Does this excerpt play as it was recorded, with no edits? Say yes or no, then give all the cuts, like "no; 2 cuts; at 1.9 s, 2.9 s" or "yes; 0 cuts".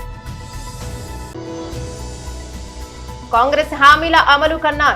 no; 1 cut; at 1.3 s